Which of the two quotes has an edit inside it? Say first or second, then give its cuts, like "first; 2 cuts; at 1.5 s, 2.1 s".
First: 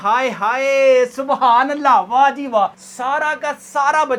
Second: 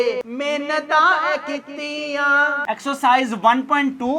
second; 1 cut; at 2.6 s